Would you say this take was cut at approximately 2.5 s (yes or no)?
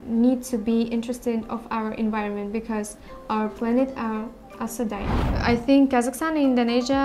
no